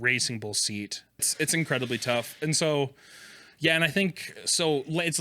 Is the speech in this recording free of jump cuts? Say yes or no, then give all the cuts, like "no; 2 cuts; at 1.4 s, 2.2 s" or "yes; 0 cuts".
no; 1 cut; at 1.3 s